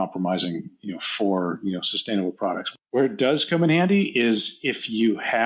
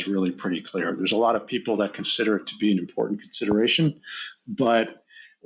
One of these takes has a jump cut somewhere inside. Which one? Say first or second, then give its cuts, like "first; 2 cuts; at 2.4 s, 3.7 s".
first; 1 cut; at 2.6 s